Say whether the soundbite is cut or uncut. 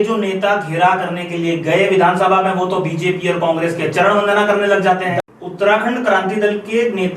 cut